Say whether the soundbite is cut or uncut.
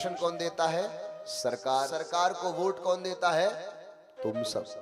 cut